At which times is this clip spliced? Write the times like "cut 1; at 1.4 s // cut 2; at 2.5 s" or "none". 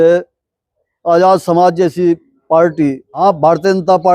cut 1; at 3.2 s

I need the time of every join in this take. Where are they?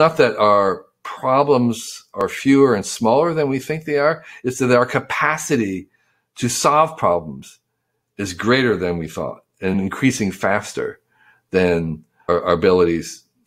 cut 1; at 9.7 s // cut 2; at 12.1 s

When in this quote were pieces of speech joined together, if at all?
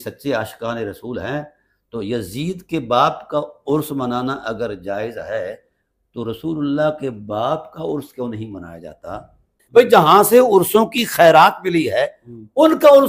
cut 1; at 9.5 s

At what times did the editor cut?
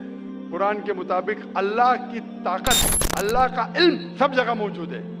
none

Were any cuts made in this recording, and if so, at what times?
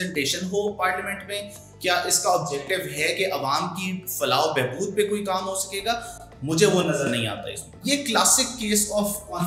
cut 1; at 7.7 s

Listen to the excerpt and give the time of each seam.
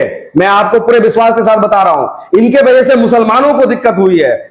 none

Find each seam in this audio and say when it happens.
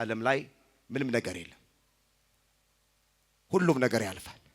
none

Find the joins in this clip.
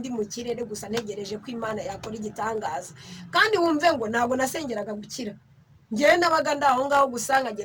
none

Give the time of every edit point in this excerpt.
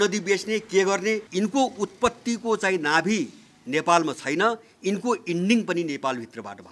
cut 1; at 1.3 s

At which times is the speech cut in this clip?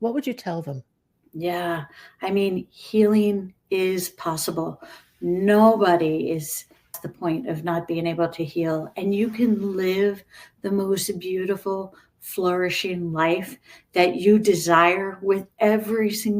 cut 1; at 6.9 s

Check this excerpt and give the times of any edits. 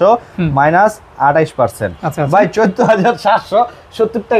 none

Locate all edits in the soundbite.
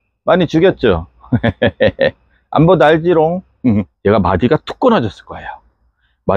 cut 1; at 3.9 s

